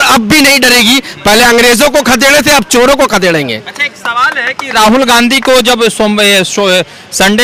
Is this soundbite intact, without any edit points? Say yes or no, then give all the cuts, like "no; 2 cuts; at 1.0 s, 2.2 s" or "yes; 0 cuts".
yes; 0 cuts